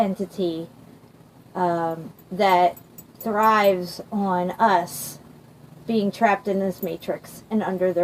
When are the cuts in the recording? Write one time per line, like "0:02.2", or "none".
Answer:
0:03.2